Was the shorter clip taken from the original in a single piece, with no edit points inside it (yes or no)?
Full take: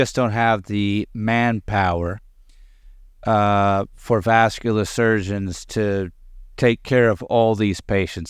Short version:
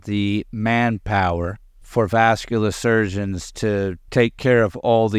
no